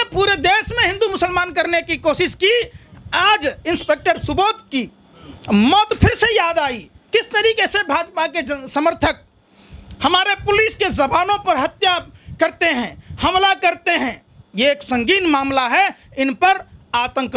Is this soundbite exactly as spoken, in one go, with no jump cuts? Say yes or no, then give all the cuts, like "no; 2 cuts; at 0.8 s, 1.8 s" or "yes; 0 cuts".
yes; 0 cuts